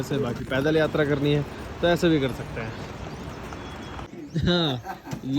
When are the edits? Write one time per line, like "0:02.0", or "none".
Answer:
0:04.1